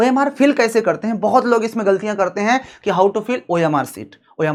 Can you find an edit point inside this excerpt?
no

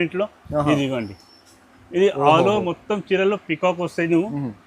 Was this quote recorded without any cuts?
yes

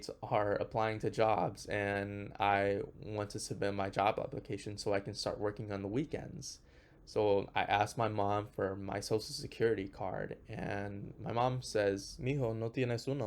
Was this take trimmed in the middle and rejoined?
yes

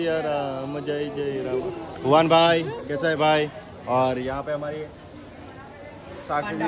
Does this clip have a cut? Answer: no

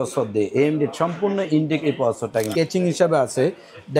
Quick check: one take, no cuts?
no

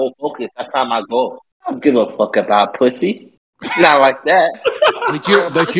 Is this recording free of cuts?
no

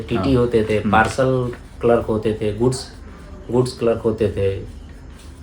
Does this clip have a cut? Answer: no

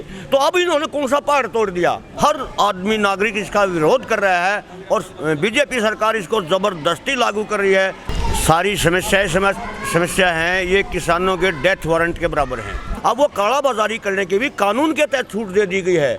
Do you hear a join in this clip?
yes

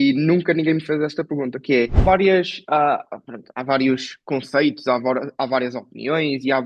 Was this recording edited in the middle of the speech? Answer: yes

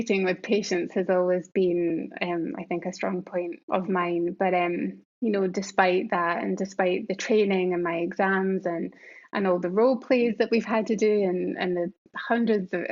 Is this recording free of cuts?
no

